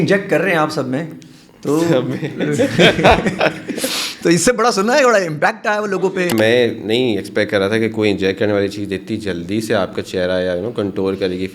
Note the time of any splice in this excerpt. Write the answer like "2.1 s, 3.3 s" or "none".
5.9 s